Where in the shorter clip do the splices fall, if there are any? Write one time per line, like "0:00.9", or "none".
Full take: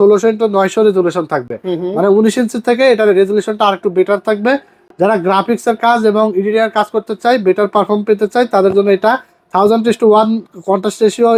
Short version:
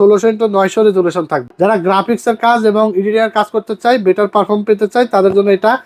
0:01.4